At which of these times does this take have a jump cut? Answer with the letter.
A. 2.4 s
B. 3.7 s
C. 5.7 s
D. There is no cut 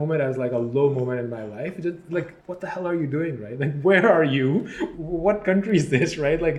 A